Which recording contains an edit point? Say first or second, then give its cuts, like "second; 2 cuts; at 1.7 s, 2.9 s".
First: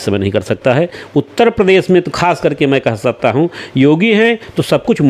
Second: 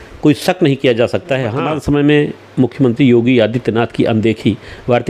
second; 1 cut; at 1.4 s